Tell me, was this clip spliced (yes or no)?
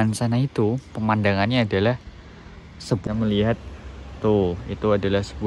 yes